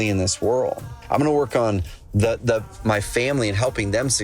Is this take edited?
yes; 1 cut; at 0.9 s

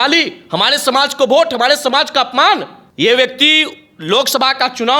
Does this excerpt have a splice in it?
yes; 1 cut; at 2.8 s

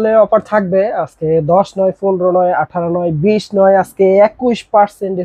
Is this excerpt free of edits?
yes; 0 cuts

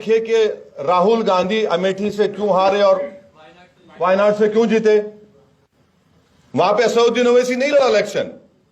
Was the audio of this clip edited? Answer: no; 0 cuts

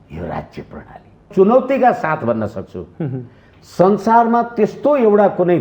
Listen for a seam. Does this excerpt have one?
yes; 1 cut; at 1.3 s

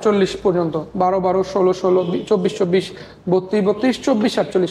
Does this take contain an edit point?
no; 0 cuts

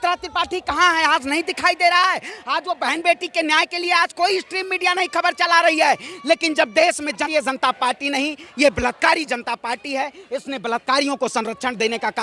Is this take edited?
yes; 1 cut; at 7.2 s

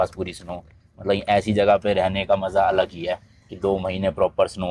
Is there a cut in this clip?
no; 0 cuts

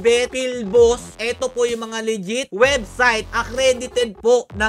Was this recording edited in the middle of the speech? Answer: yes; 1 cut; at 1.1 s

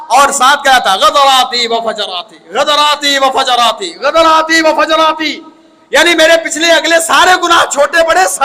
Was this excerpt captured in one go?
yes; 0 cuts

